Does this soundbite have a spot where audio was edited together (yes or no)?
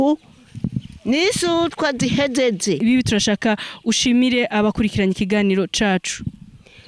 yes